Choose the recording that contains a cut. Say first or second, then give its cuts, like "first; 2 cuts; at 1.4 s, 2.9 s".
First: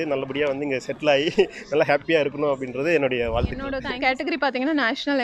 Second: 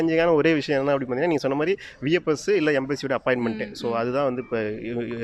first; 1 cut; at 3.8 s